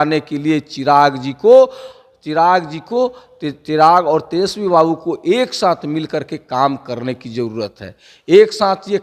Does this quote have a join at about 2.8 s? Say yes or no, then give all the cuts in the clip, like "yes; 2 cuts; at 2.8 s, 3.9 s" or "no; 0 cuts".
no; 0 cuts